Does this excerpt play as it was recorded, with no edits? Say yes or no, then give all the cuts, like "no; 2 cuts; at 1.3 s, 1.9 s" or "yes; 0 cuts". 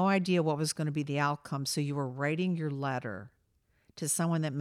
yes; 0 cuts